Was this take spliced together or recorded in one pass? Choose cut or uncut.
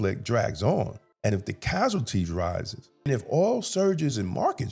cut